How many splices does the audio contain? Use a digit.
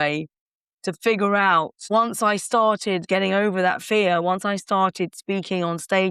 2